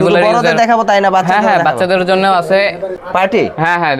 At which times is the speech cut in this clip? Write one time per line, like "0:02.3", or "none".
0:03.0

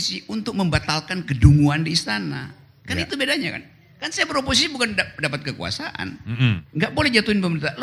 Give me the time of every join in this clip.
0:06.6

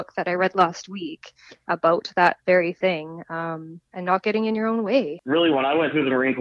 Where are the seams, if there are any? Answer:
0:05.2

